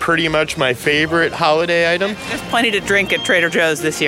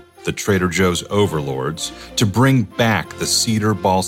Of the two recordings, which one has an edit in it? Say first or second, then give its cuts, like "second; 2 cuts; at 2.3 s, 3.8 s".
first; 1 cut; at 2.2 s